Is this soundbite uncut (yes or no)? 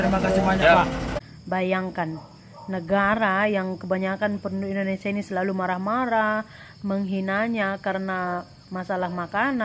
no